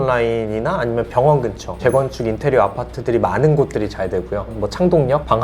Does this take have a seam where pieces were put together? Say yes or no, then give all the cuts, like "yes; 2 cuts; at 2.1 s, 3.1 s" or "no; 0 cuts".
yes; 2 cuts; at 1.8 s, 4.5 s